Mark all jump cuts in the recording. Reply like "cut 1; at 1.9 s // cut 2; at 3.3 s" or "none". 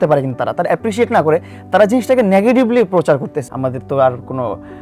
cut 1; at 3.4 s